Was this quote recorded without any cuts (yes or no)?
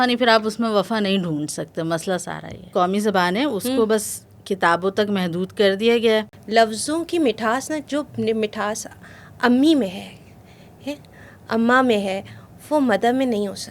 no